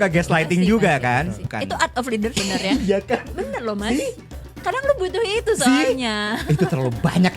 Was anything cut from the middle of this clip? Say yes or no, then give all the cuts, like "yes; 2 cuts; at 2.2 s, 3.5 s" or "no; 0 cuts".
yes; 2 cuts; at 1.4 s, 2.3 s